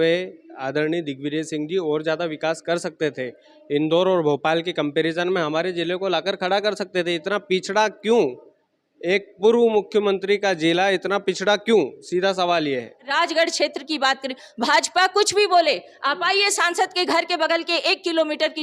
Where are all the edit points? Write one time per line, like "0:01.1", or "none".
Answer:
0:13.0